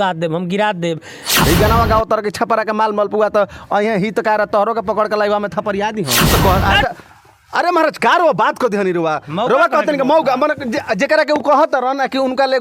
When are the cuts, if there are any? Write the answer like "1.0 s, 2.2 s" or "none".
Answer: 1.3 s, 6.2 s